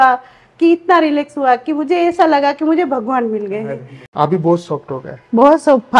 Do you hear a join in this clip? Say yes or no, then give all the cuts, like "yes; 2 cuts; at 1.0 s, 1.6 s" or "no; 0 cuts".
yes; 1 cut; at 4.0 s